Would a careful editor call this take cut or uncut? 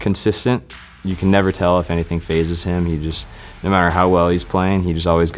uncut